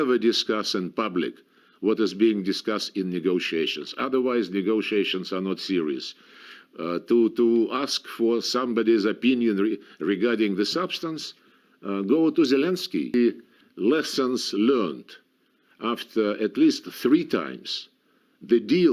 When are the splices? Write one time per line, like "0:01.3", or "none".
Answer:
0:13.1